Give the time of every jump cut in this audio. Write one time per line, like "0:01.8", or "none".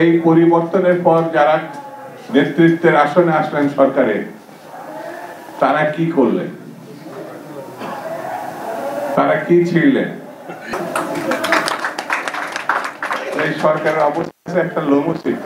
none

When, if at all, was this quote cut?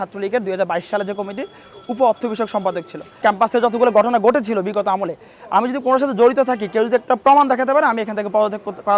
0:03.1

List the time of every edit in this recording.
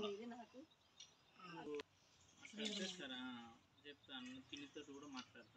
0:01.8

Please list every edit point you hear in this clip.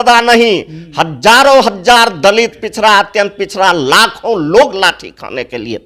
none

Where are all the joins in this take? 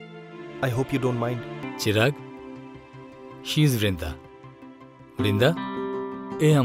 0:01.6

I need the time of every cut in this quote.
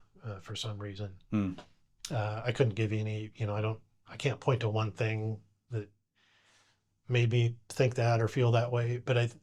none

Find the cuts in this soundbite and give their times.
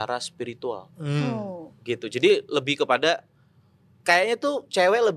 none

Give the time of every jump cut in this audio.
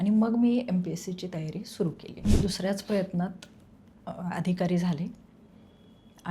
0:02.3

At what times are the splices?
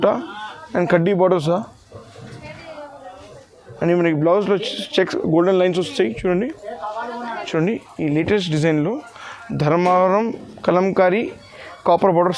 0:07.4

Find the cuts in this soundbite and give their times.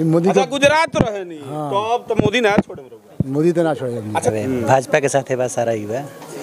0:04.3

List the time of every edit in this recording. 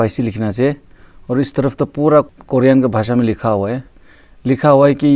0:02.3

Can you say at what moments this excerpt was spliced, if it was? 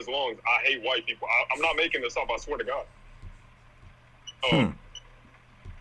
none

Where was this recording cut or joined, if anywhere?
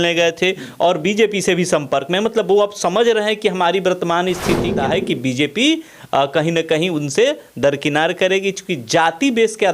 0:04.7

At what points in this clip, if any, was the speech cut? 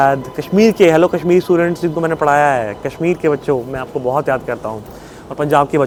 none

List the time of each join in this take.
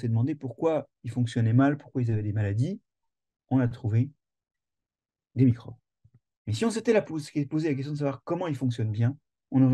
none

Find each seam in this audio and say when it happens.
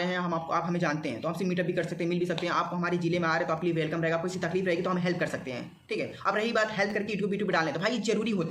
none

